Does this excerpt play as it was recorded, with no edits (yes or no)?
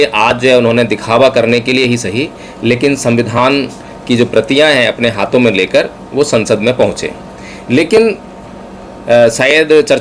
yes